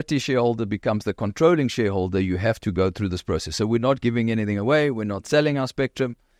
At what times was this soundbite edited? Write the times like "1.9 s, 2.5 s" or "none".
none